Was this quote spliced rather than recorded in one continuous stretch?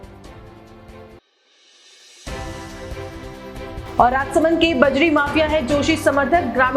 yes; 2 cuts; at 1.3 s, 3.8 s

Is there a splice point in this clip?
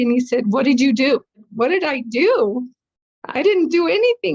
yes; 1 cut; at 1.5 s

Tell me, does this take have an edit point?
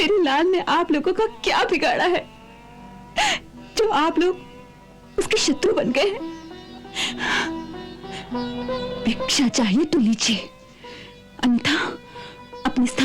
no; 0 cuts

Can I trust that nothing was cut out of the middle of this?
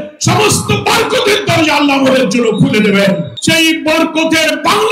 no; 1 cut; at 3.3 s

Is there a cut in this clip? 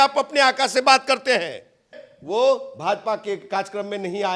yes; 1 cut; at 2.0 s

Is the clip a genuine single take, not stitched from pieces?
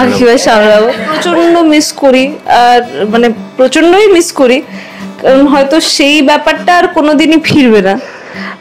no; 1 cut; at 1.1 s

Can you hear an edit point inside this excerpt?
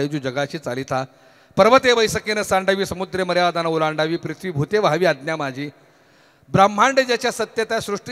no; 0 cuts

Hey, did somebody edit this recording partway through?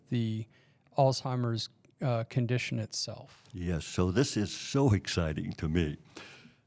no; 0 cuts

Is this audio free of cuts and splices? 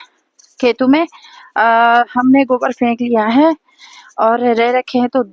yes; 0 cuts

